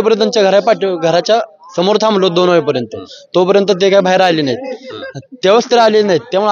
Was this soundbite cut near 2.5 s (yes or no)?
no